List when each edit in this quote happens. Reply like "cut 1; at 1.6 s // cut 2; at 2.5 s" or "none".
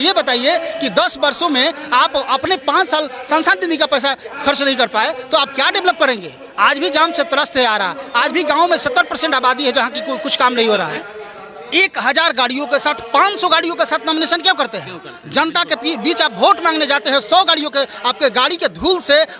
cut 1; at 11.0 s